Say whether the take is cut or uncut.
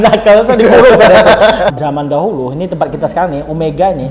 cut